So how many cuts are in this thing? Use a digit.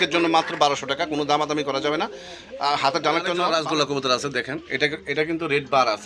1